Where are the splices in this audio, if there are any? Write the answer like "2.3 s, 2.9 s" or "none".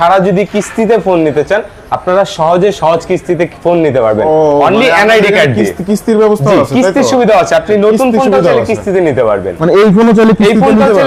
none